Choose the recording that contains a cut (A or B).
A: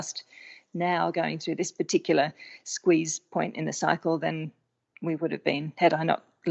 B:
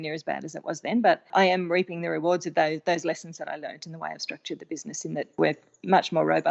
B